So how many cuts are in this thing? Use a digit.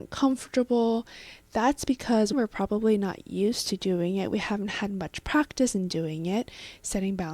1